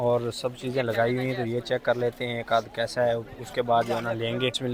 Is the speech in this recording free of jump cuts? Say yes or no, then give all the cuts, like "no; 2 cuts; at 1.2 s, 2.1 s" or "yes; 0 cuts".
yes; 0 cuts